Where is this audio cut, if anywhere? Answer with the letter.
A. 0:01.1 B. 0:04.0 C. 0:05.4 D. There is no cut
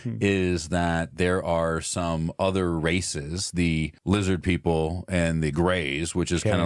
B